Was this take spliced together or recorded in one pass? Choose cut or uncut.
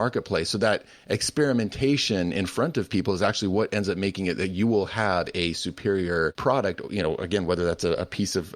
cut